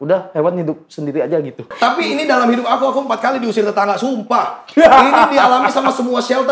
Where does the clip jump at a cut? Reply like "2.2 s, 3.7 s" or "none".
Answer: 1.7 s